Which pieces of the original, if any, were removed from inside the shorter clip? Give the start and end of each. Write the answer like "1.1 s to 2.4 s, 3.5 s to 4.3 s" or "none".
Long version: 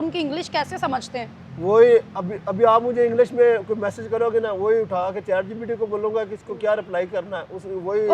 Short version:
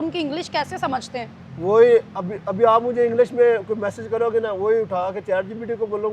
none